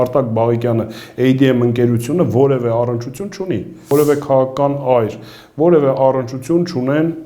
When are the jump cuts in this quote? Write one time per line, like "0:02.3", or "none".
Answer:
0:03.8